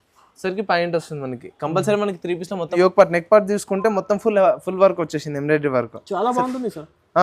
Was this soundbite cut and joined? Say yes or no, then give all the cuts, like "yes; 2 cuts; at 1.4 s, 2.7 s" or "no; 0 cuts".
yes; 1 cut; at 2.7 s